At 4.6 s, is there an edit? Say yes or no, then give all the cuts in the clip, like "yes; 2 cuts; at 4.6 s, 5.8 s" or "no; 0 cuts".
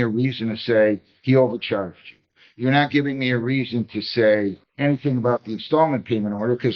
yes; 1 cut; at 4.6 s